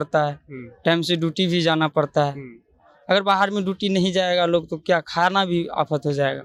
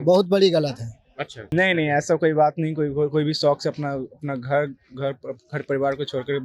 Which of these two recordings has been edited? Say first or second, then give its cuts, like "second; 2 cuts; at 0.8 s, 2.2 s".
second; 1 cut; at 1.4 s